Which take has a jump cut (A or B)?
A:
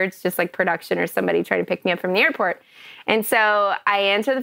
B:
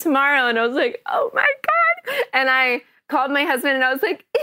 A